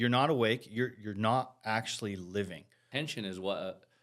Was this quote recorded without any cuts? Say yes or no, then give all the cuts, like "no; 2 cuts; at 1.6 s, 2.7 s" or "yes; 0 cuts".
no; 1 cut; at 2.7 s